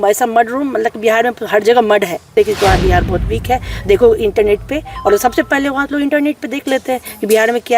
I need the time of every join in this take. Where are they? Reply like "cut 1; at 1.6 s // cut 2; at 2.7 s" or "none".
cut 1; at 2.3 s